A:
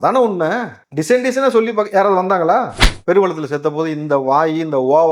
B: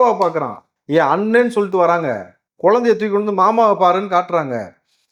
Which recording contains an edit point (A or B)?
A